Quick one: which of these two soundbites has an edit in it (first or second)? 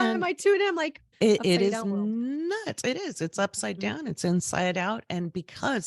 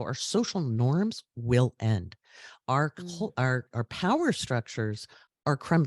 first